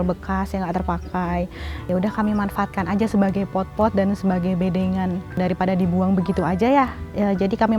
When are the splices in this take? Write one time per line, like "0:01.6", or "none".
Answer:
0:01.9
0:05.3